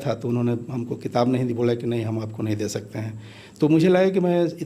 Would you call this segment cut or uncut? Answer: uncut